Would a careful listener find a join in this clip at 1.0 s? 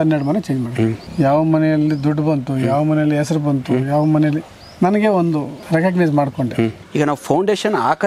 yes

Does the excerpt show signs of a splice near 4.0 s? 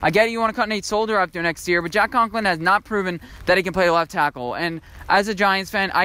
no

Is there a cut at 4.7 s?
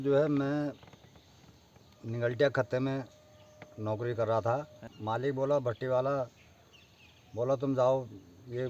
yes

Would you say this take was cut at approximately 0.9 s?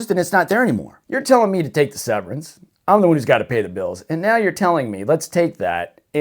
yes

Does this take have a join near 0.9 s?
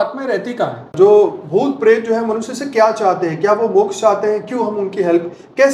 yes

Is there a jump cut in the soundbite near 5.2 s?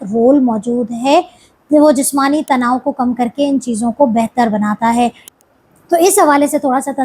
yes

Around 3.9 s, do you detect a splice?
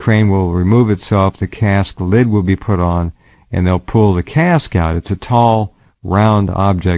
no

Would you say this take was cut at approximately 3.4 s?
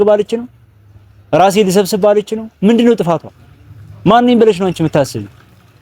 no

